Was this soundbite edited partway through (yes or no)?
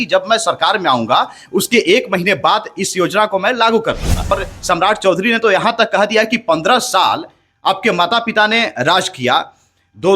yes